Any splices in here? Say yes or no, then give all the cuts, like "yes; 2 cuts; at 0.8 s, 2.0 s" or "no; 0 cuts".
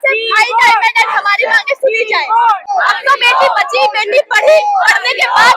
yes; 1 cut; at 2.6 s